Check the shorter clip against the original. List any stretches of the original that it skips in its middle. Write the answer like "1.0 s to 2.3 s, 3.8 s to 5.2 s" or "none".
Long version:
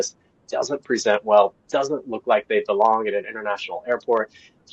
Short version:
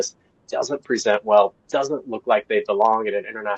none